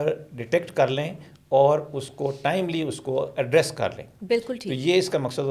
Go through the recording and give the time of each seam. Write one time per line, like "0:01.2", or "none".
none